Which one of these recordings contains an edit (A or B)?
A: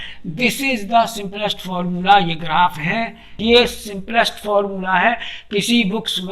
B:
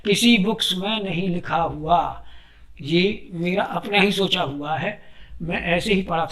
A